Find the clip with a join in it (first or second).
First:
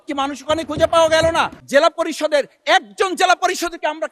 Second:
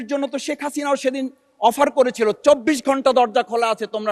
first